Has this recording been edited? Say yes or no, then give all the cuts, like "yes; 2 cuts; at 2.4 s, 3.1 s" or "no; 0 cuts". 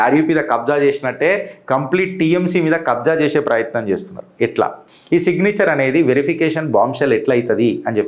no; 0 cuts